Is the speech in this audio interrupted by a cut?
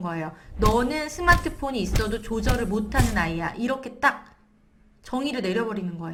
no; 0 cuts

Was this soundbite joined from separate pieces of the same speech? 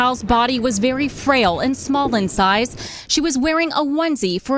no; 0 cuts

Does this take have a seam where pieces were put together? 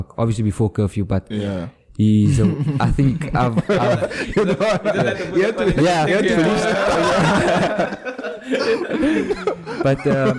no; 0 cuts

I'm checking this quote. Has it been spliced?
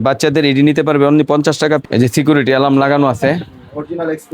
yes; 1 cut; at 1.8 s

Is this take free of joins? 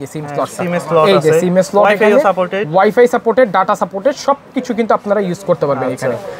yes; 0 cuts

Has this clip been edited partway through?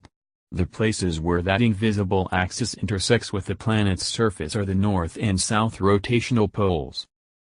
no; 0 cuts

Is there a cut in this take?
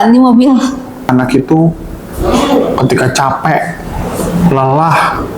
yes; 1 cut; at 1.1 s

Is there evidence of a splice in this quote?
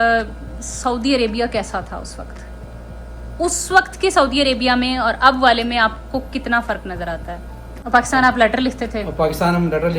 yes; 1 cut; at 7.7 s

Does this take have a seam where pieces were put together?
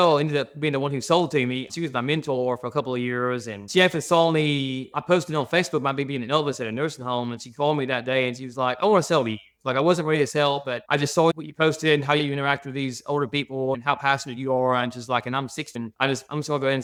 no; 0 cuts

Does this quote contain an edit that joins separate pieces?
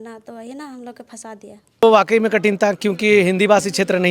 yes; 1 cut; at 1.8 s

